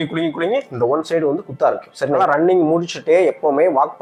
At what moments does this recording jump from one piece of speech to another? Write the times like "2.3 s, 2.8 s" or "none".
2.2 s